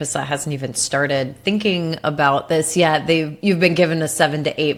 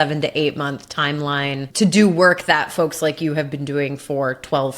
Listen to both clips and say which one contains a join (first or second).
second